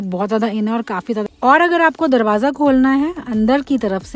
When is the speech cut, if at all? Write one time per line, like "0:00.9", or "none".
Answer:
0:01.3